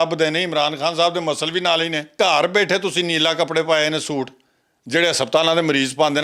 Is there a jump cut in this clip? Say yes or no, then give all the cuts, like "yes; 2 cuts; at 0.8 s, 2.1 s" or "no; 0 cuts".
yes; 1 cut; at 2.1 s